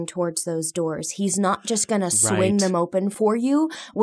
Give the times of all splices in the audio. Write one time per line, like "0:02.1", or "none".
0:03.1

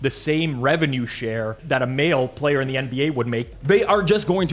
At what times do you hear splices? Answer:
0:01.6
0:03.5

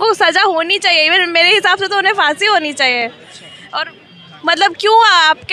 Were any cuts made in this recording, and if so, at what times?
none

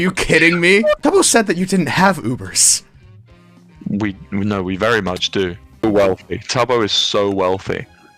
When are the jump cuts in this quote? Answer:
0:01.0
0:05.8

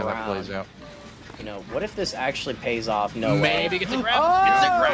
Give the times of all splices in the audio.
none

